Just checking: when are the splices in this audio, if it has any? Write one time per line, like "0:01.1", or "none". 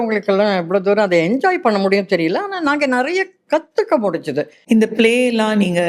0:04.6